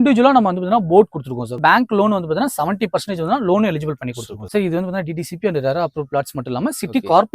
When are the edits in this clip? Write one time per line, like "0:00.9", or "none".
0:01.6
0:04.3